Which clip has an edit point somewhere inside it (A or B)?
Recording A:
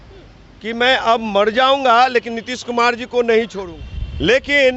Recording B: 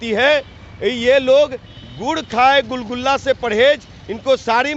A